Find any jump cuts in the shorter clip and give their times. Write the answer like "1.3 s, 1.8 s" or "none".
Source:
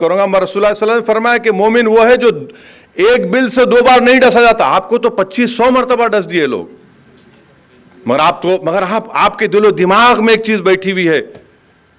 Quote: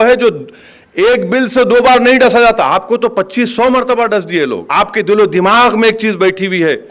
4.6 s